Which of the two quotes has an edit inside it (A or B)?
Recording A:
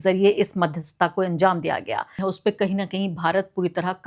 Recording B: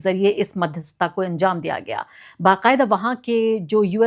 A